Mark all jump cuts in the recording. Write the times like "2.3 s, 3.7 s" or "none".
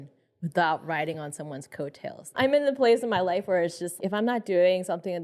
2.3 s, 4.0 s